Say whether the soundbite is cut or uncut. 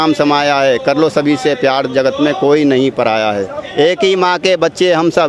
uncut